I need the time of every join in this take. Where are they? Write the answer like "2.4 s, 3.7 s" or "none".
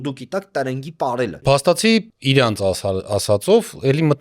1.4 s, 2.1 s